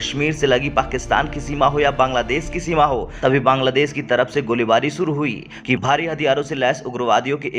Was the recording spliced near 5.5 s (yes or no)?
yes